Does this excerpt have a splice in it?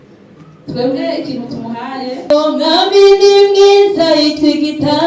yes; 1 cut; at 2.3 s

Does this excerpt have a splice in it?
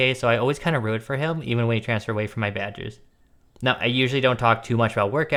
no; 0 cuts

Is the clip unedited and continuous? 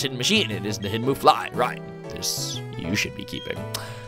yes; 0 cuts

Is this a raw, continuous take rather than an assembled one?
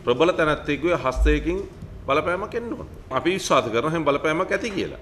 no; 1 cut; at 3.1 s

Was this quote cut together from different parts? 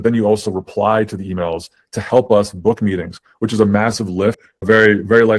yes; 1 cut; at 4.5 s

